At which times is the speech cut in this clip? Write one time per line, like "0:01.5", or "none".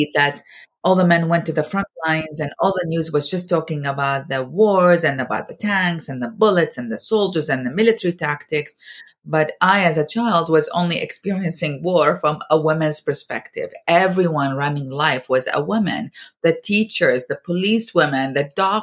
none